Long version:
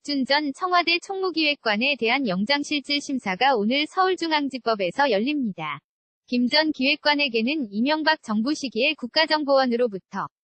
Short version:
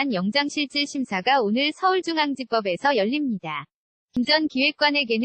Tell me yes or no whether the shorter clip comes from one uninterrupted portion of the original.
no